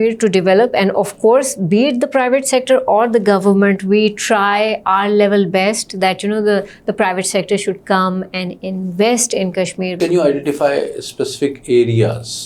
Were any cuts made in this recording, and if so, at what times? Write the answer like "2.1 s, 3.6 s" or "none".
10.0 s

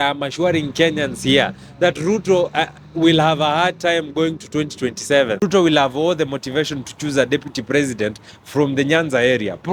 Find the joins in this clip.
5.4 s

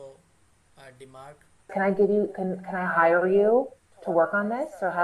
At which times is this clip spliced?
1.7 s

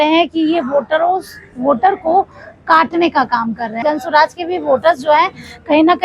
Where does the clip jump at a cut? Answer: 3.7 s

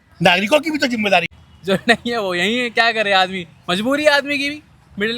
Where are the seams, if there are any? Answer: 1.3 s

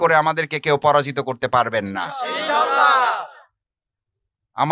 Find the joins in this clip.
none

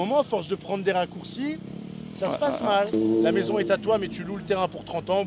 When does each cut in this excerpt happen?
2.9 s

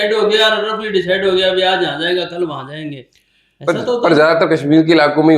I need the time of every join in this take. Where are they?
none

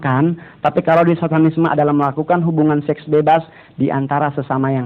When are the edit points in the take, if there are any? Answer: none

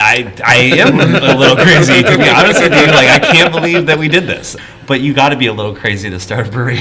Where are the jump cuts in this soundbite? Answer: 4.5 s

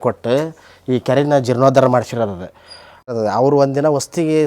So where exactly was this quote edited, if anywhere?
3.1 s

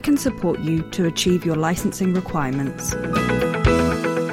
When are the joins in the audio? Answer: 2.9 s

